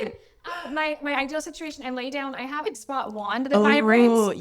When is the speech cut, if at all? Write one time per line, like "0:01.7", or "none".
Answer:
0:02.8